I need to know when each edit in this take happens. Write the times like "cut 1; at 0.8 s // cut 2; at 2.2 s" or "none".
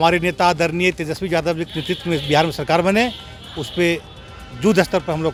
none